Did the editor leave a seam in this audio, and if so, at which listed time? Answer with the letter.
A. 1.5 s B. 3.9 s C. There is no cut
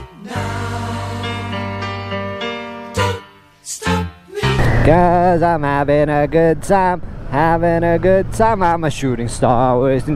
C